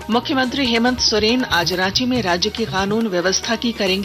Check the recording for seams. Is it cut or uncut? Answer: uncut